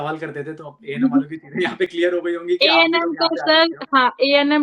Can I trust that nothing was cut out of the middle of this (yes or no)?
yes